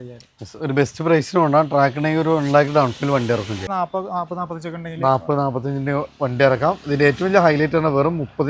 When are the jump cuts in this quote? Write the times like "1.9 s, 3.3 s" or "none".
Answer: 3.6 s